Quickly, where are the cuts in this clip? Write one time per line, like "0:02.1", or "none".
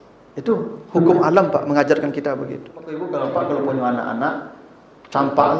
0:03.0